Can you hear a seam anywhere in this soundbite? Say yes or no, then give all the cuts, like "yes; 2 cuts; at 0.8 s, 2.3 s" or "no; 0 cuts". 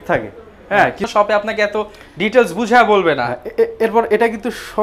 yes; 1 cut; at 1.1 s